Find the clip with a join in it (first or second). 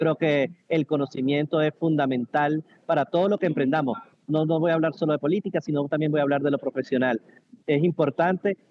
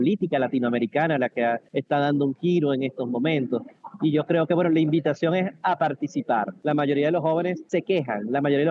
second